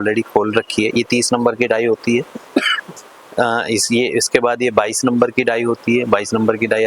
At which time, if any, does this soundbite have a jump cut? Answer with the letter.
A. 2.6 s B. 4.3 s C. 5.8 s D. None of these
D